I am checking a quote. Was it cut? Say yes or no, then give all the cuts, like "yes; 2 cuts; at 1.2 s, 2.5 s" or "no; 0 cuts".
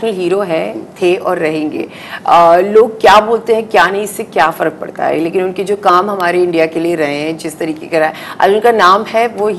no; 0 cuts